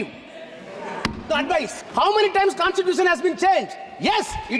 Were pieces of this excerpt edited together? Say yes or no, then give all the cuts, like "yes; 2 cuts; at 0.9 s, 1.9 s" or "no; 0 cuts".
yes; 1 cut; at 1.8 s